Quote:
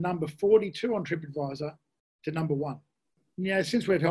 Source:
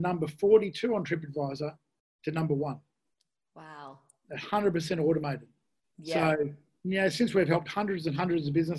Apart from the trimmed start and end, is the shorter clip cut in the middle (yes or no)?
yes